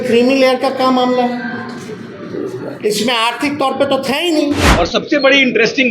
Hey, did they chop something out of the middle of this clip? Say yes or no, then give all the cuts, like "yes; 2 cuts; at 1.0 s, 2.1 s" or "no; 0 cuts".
yes; 1 cut; at 4.7 s